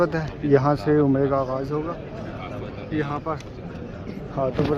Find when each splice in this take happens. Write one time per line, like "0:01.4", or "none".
none